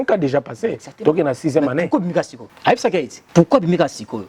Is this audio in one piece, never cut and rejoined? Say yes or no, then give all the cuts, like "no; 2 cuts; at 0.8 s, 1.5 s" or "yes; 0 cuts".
no; 2 cuts; at 2.4 s, 3.2 s